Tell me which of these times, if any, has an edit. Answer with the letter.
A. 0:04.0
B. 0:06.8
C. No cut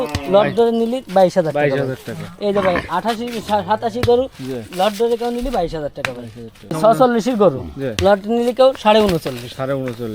B